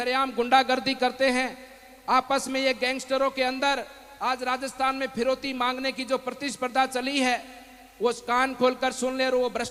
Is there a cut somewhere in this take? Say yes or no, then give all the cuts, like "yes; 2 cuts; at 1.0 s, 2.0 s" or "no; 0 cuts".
no; 0 cuts